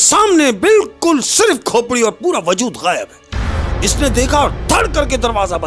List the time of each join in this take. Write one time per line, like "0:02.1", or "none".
none